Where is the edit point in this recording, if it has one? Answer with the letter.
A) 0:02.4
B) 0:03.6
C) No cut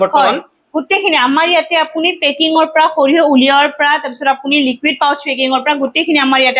C